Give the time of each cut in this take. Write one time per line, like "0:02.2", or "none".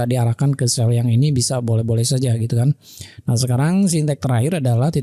none